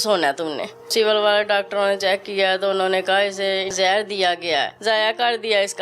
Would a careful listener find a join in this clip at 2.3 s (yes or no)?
no